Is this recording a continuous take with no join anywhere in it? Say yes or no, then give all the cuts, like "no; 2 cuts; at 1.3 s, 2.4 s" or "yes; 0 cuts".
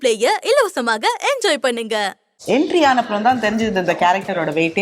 no; 1 cut; at 2.3 s